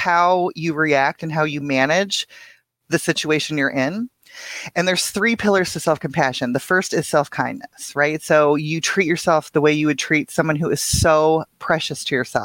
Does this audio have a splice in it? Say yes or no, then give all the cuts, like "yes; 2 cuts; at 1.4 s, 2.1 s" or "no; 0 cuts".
no; 0 cuts